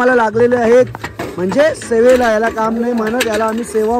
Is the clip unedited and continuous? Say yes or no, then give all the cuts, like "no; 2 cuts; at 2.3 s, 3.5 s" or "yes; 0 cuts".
yes; 0 cuts